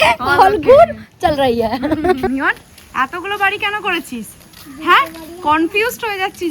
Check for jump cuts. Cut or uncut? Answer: cut